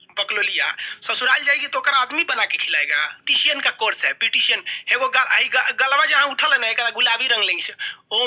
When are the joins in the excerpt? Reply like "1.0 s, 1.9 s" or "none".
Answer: 3.2 s